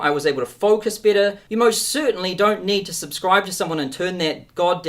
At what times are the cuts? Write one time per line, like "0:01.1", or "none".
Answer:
0:01.4